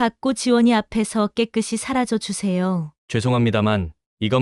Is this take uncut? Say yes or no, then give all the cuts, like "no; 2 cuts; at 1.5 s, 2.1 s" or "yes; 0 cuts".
no; 1 cut; at 3.0 s